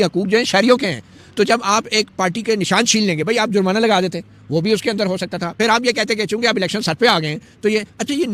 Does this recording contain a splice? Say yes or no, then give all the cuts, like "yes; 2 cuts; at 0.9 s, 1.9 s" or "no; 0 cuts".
no; 0 cuts